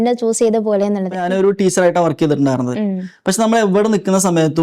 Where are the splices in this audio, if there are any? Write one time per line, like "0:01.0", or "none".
0:01.2